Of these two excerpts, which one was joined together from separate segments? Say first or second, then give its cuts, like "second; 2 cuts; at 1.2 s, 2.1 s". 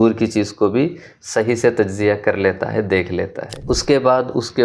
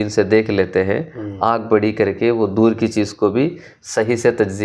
first; 1 cut; at 3.5 s